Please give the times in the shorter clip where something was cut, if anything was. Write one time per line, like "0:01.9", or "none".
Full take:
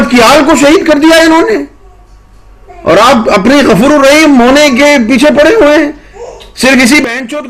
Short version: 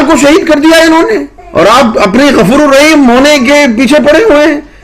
0:01.4